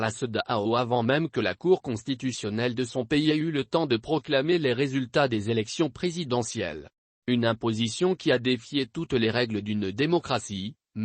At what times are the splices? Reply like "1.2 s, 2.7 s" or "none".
1.5 s